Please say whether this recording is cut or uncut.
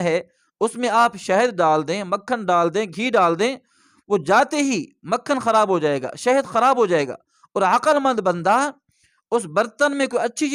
uncut